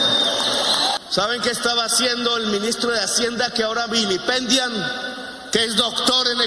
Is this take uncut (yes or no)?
no